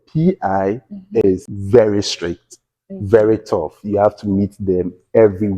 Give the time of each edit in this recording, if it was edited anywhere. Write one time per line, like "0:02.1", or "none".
0:01.5